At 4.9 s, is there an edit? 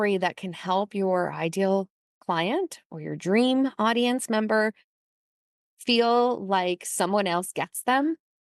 no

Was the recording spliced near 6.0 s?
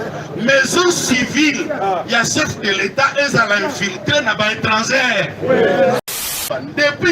yes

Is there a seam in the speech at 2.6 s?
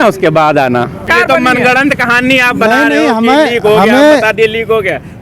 no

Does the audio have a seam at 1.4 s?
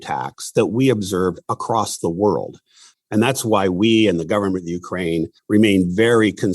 no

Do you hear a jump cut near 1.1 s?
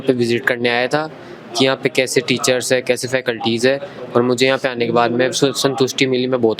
no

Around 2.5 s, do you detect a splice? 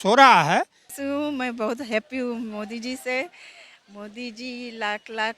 no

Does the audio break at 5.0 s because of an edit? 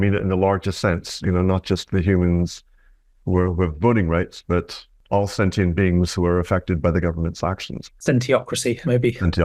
yes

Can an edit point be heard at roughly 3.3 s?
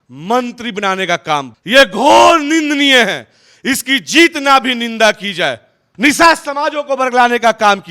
no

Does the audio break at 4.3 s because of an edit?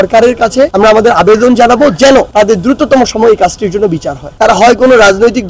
yes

